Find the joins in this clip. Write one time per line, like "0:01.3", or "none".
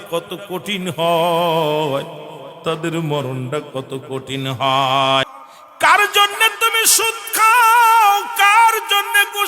0:05.2

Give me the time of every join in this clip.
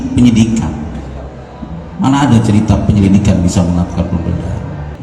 none

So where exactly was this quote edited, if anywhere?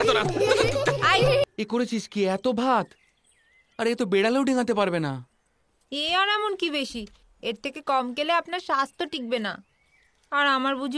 0:01.4

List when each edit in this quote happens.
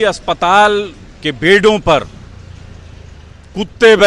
none

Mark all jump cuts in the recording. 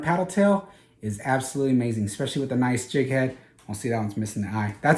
none

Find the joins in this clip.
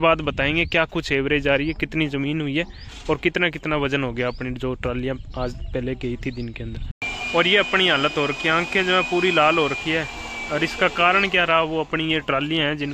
none

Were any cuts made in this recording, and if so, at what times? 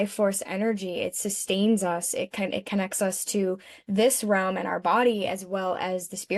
none

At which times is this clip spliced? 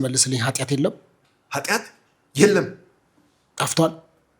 none

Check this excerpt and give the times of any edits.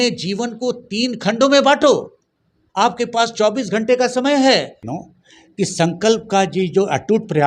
0:04.8

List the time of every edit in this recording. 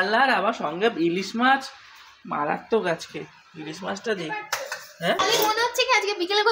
0:05.2

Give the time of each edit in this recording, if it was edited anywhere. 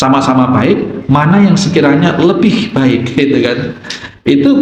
none

